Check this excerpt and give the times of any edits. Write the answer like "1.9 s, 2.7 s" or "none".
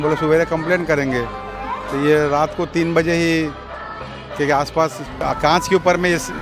5.2 s